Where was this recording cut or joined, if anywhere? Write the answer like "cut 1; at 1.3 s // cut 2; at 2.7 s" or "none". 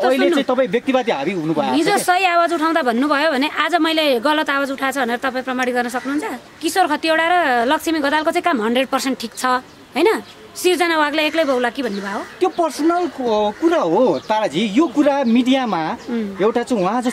cut 1; at 6.4 s